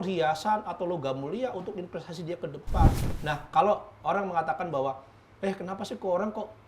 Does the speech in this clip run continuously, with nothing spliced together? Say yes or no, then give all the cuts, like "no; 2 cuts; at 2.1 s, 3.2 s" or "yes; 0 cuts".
no; 1 cut; at 3.0 s